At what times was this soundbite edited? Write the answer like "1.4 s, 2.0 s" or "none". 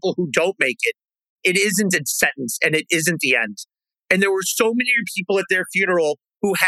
1.4 s